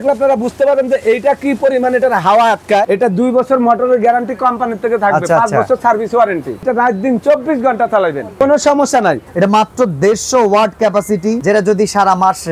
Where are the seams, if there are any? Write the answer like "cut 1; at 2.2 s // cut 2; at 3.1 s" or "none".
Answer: cut 1; at 2.9 s // cut 2; at 6.6 s // cut 3; at 8.4 s // cut 4; at 9.3 s // cut 5; at 11.4 s